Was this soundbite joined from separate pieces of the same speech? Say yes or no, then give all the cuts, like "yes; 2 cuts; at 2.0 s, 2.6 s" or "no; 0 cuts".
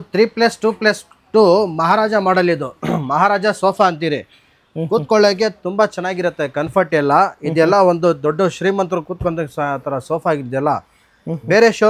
no; 0 cuts